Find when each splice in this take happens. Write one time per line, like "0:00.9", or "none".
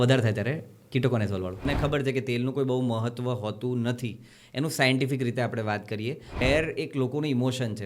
0:01.7
0:06.4